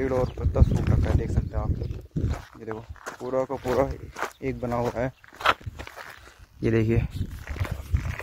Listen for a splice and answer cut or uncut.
uncut